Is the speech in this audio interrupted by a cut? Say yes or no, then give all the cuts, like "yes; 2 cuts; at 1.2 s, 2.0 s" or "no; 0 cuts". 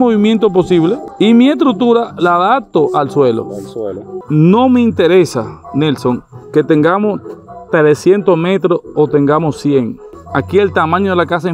yes; 1 cut; at 4.1 s